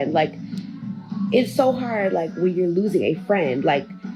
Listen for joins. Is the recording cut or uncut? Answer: uncut